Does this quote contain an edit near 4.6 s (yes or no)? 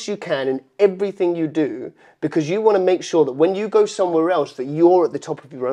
no